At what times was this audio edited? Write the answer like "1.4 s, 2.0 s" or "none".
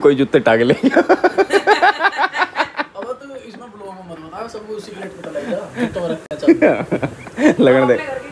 none

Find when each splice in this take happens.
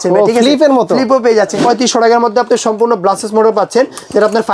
1.6 s

